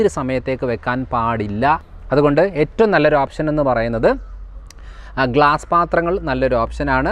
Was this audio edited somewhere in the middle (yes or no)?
yes